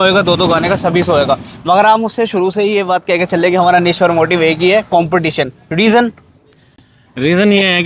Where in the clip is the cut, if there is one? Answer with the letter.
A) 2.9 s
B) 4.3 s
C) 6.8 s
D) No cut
D